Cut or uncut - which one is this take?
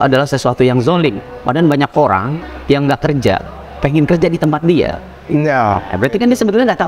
cut